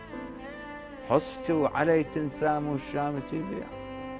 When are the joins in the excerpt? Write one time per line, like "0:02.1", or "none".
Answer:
0:02.1